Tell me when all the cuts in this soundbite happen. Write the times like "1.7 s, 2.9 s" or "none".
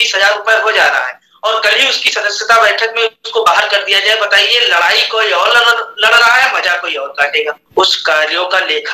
7.6 s